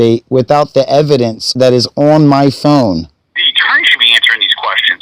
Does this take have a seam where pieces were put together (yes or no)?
yes